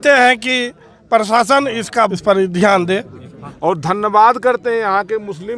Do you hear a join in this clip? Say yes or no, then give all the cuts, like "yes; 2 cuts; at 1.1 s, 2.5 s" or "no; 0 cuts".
yes; 2 cuts; at 2.2 s, 3.4 s